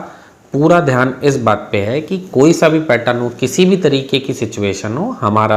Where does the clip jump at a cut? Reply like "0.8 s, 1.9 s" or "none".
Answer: none